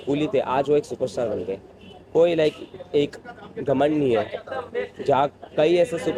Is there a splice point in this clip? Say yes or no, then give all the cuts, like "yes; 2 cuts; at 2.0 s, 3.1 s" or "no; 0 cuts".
no; 0 cuts